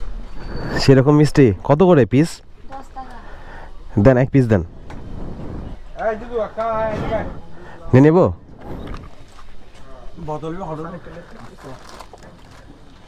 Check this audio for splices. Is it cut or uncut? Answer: uncut